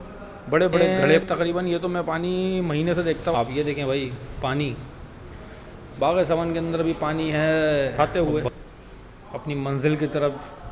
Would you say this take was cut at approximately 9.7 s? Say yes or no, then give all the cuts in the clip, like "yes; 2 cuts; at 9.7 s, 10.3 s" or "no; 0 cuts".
no; 3 cuts; at 1.2 s, 3.3 s, 7.9 s